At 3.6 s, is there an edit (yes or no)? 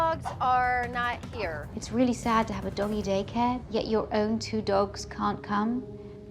yes